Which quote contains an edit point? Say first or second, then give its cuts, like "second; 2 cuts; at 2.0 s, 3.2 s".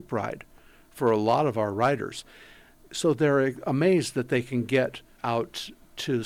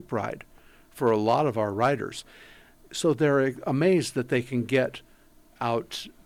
first; 1 cut; at 5.1 s